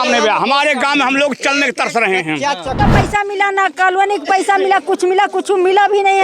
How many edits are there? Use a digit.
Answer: 1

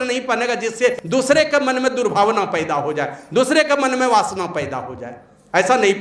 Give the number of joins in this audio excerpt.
1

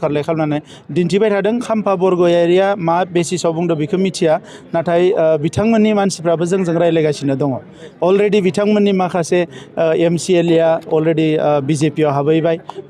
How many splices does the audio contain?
1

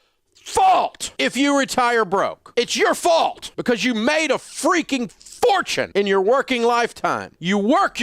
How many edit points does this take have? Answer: 1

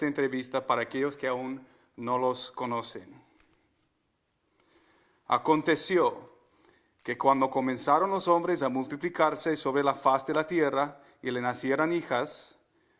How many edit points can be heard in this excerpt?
1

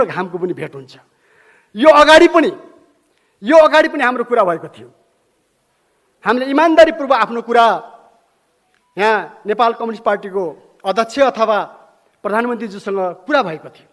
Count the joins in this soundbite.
0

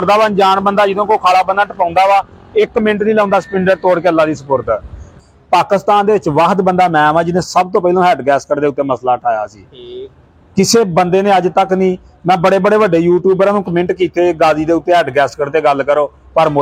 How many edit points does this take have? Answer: 1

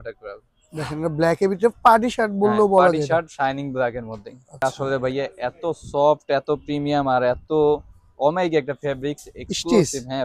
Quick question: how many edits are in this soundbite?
1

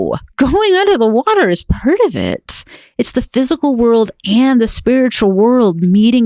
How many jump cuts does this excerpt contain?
0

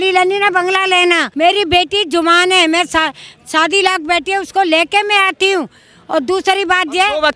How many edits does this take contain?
1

